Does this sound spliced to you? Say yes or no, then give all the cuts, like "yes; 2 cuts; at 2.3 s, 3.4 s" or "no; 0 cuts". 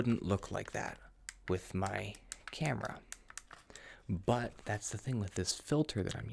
no; 0 cuts